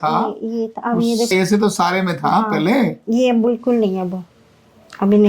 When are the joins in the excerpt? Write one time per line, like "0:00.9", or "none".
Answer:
0:01.3